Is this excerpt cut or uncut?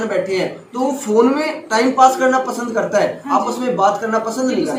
uncut